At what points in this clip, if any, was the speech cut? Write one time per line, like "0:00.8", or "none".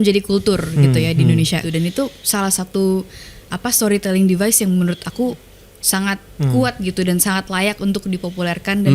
0:01.7

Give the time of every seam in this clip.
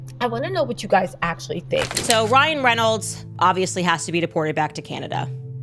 0:02.0

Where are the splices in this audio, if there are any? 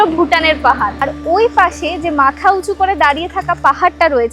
0:01.1

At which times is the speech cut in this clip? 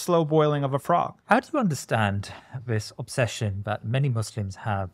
0:01.2

